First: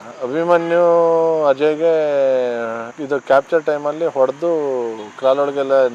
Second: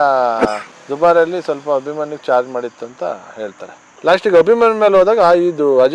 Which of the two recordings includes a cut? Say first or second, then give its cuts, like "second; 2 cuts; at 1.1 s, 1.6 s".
second; 1 cut; at 3.8 s